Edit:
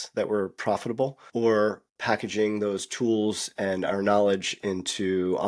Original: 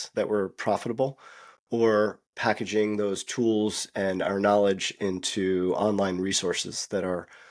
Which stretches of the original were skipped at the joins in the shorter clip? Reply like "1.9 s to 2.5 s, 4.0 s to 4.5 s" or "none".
1.2 s to 1.6 s